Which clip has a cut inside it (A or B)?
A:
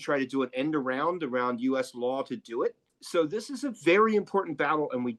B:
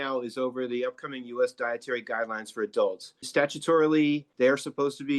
B